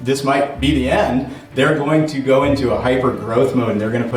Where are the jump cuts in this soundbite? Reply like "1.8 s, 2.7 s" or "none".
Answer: none